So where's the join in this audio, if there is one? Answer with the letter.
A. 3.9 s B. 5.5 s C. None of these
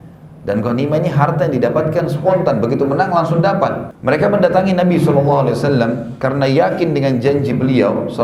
A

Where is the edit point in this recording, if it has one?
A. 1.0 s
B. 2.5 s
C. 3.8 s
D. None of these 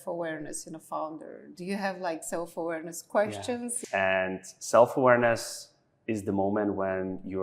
C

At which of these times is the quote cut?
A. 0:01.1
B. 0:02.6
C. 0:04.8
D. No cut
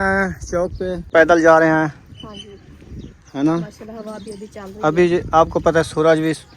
A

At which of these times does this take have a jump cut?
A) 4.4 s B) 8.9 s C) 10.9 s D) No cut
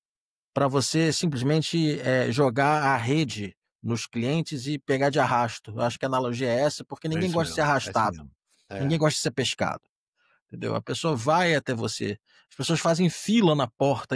D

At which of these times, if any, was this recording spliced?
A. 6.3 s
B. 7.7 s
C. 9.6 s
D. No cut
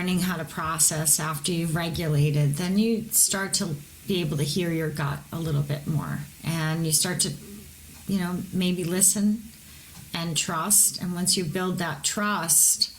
A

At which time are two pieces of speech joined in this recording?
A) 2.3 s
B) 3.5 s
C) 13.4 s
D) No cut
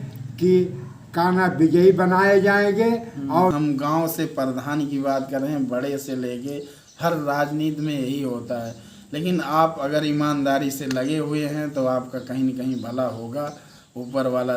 B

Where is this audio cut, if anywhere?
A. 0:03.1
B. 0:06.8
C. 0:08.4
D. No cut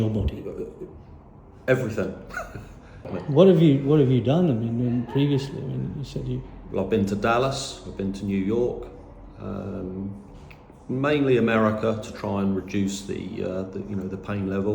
A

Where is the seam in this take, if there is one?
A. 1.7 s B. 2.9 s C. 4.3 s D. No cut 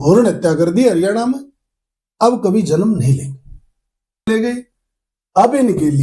C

